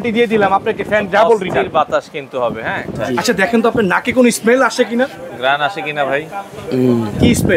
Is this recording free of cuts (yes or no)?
no